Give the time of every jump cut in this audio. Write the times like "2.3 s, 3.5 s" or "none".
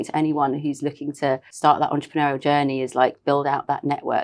1.5 s